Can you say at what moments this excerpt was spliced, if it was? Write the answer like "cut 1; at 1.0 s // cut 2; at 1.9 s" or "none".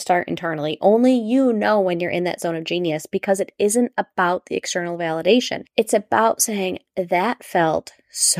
cut 1; at 5.6 s